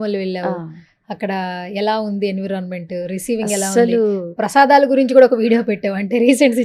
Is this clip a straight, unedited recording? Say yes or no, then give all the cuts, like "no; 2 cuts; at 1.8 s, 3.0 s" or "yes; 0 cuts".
yes; 0 cuts